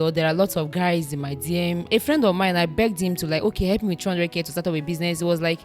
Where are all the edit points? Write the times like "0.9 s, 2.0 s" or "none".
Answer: 1.9 s